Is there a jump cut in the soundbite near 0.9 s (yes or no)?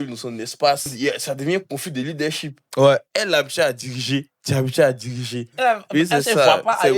yes